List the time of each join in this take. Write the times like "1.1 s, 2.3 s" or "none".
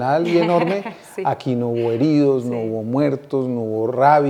none